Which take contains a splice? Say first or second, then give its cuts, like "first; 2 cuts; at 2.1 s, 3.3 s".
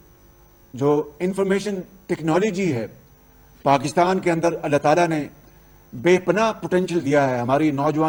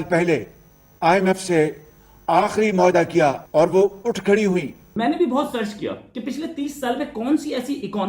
second; 2 cuts; at 3.4 s, 4.8 s